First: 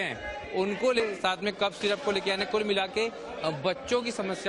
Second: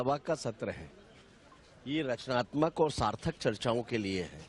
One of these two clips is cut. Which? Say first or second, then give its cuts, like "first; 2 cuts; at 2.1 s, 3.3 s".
first; 1 cut; at 1.0 s